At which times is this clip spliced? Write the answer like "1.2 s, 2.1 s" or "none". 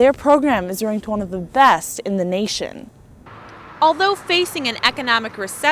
3.3 s